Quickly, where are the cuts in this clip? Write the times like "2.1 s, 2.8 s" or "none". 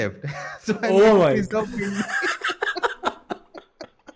none